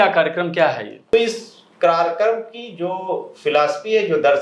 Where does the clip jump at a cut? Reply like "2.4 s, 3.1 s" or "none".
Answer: 0.9 s